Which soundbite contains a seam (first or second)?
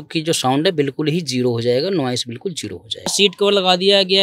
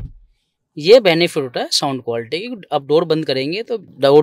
first